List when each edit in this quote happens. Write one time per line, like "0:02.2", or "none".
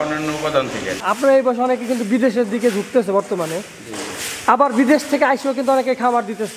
0:01.0